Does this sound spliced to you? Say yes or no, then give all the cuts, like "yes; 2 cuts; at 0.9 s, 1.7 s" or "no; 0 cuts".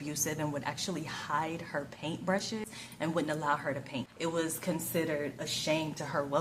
yes; 2 cuts; at 2.6 s, 4.1 s